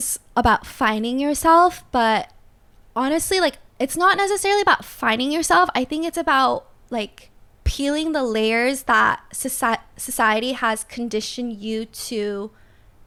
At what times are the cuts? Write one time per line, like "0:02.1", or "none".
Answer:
none